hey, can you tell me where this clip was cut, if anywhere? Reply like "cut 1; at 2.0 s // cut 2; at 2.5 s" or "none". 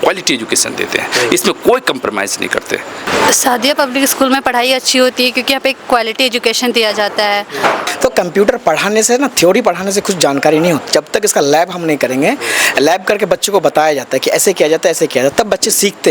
cut 1; at 3.1 s // cut 2; at 7.5 s